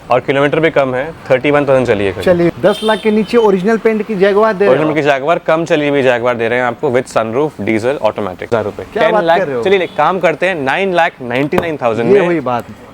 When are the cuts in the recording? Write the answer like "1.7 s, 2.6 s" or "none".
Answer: 2.5 s, 8.4 s